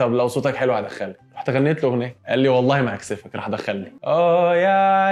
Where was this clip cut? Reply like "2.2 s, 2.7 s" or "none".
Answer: 3.9 s